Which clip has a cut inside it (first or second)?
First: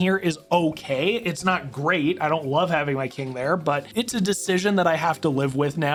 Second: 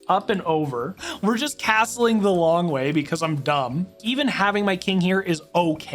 second